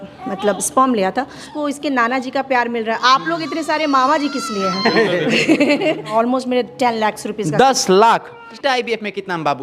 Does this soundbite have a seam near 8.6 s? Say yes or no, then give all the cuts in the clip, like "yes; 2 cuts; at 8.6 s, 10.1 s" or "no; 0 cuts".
yes; 3 cuts; at 1.4 s, 6.1 s, 8.6 s